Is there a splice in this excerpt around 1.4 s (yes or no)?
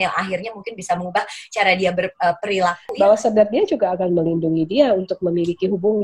no